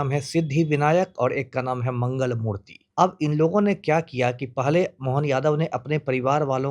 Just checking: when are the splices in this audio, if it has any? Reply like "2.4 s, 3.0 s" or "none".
2.7 s